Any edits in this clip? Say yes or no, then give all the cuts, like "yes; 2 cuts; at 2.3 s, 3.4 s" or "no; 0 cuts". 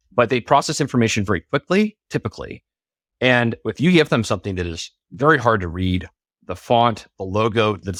no; 0 cuts